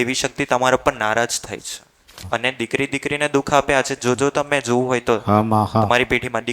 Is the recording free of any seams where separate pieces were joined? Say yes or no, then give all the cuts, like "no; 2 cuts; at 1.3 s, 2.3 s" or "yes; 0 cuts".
no; 1 cut; at 2.2 s